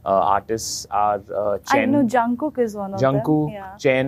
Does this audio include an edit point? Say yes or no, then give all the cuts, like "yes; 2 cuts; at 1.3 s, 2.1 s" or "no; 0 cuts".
no; 0 cuts